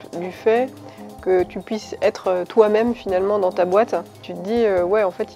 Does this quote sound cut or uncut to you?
cut